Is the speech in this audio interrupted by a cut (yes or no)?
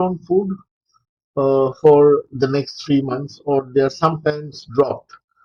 no